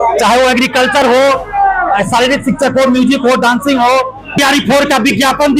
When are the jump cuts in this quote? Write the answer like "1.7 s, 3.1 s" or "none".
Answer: 4.4 s